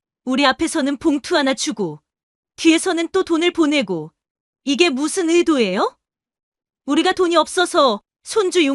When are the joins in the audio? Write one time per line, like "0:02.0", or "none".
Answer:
none